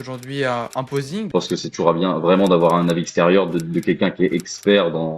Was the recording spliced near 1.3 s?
yes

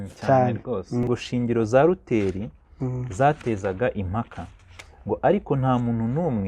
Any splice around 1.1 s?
yes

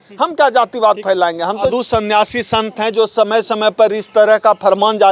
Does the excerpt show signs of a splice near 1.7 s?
yes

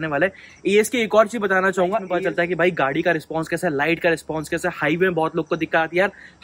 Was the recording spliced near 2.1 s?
yes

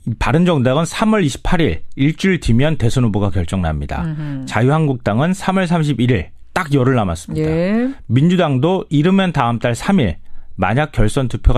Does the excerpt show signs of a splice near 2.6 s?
no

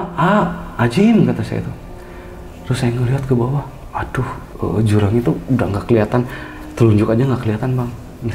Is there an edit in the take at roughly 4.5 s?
yes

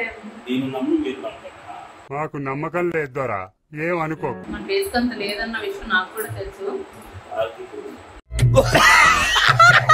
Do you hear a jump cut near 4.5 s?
yes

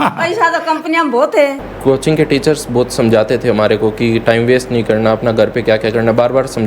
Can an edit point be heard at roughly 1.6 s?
yes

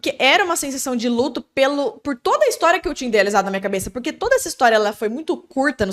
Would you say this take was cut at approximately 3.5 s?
no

